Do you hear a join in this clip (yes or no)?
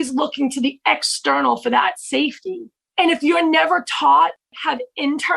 yes